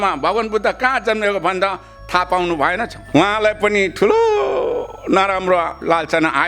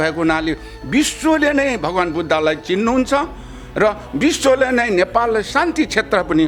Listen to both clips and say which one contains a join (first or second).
first